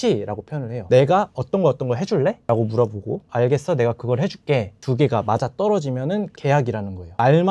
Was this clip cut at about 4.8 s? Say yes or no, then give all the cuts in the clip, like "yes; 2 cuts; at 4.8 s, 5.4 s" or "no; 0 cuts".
yes; 3 cuts; at 3.2 s, 4.8 s, 6.3 s